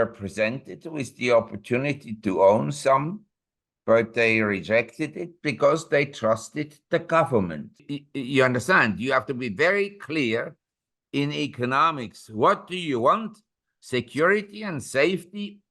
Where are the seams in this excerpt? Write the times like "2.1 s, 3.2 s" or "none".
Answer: 7.8 s